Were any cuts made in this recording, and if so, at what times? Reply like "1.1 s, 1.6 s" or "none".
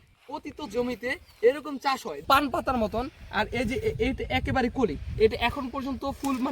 2.2 s